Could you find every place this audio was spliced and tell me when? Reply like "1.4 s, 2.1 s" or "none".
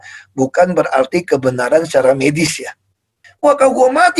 3.2 s